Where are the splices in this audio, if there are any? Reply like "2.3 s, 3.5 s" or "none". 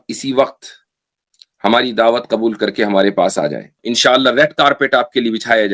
3.8 s